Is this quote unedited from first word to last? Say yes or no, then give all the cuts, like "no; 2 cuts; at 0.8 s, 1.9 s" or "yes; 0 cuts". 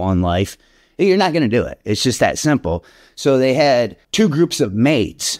no; 1 cut; at 4.0 s